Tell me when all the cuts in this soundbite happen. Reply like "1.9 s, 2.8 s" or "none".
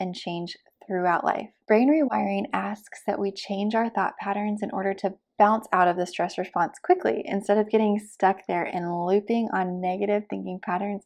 1.5 s

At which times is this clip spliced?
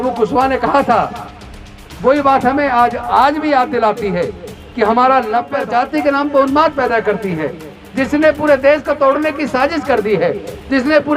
5.6 s

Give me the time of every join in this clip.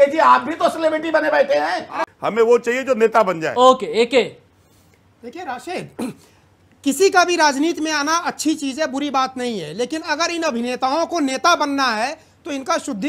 2.1 s

